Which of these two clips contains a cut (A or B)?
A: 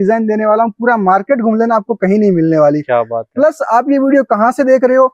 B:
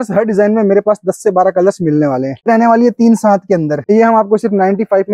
B